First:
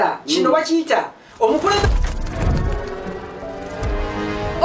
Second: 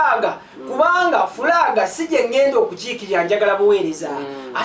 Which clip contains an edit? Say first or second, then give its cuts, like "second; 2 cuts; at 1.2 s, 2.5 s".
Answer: first; 1 cut; at 1.8 s